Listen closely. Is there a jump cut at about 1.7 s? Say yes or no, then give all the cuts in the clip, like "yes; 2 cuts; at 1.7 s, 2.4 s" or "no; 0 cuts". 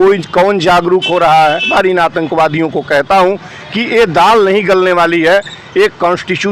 yes; 1 cut; at 1.7 s